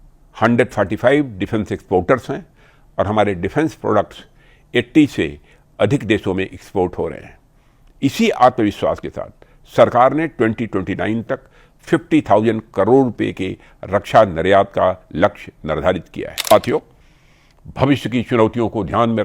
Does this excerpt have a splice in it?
yes; 1 cut; at 16.5 s

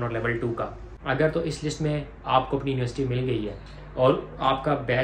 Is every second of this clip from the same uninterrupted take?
no; 1 cut; at 0.9 s

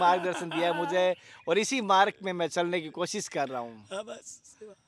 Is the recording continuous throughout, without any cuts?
yes; 0 cuts

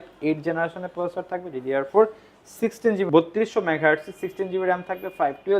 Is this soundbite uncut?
no; 1 cut; at 3.0 s

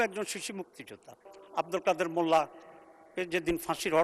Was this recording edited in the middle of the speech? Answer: yes; 1 cut; at 1.4 s

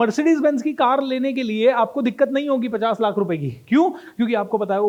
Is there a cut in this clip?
no; 0 cuts

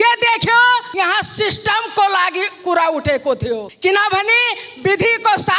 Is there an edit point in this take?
yes; 2 cuts; at 0.9 s, 3.7 s

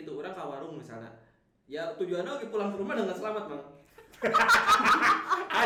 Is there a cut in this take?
no; 0 cuts

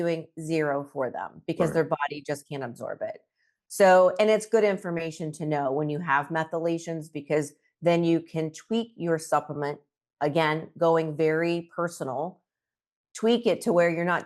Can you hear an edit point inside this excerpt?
no; 0 cuts

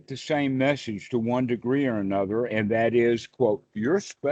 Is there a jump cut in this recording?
no; 0 cuts

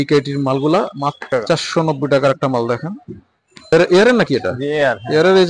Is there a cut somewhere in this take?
yes; 2 cuts; at 1.3 s, 3.7 s

